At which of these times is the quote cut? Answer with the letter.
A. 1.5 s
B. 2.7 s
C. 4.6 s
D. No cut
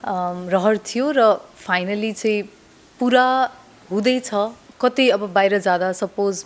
C